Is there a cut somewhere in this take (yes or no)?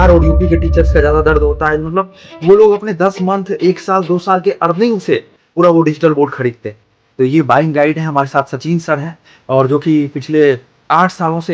no